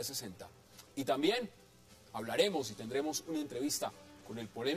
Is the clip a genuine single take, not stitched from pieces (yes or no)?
no